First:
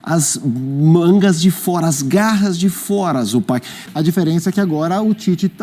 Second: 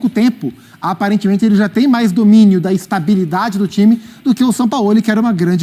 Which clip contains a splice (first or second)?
first